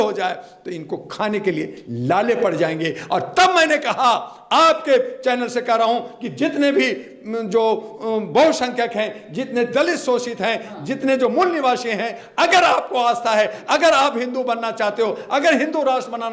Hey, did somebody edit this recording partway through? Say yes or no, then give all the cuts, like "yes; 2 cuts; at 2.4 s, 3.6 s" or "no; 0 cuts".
no; 0 cuts